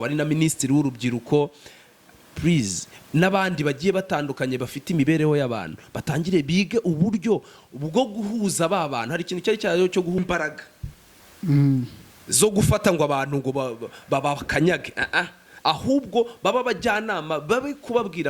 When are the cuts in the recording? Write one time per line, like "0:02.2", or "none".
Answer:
0:10.2